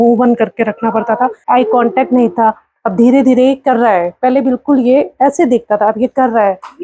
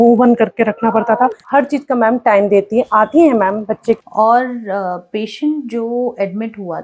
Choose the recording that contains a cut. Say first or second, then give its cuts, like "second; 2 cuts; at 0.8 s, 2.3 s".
second; 2 cuts; at 1.4 s, 4.0 s